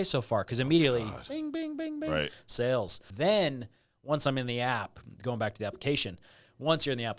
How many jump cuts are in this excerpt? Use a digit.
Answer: 1